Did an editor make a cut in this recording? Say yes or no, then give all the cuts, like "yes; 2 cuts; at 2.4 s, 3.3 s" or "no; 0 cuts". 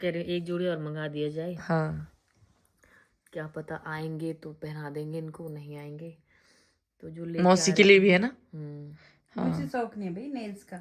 no; 0 cuts